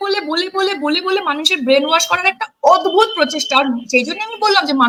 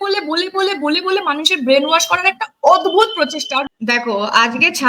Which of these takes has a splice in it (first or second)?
second